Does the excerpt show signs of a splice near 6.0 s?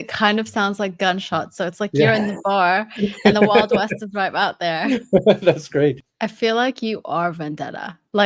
yes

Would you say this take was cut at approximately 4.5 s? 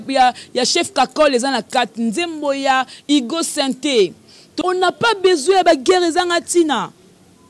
yes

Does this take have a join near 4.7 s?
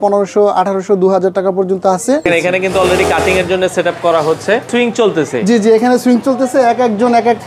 yes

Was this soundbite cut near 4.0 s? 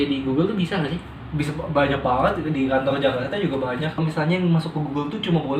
yes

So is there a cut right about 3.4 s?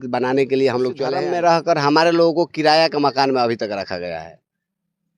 no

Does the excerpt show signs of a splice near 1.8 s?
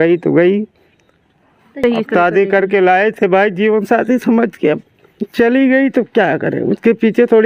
yes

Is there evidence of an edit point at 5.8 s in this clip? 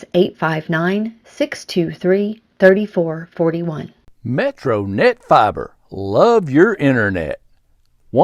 no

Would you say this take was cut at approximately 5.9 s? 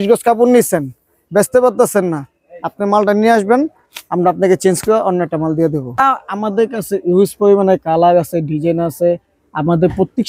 yes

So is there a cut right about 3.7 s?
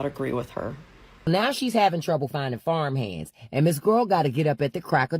no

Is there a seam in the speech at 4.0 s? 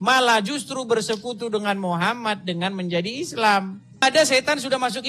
yes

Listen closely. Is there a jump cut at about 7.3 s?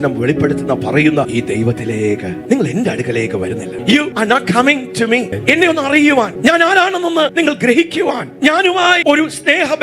yes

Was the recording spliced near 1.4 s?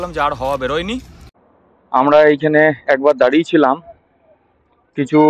yes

